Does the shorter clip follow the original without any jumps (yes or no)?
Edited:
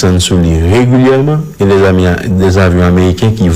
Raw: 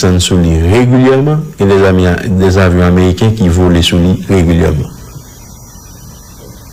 yes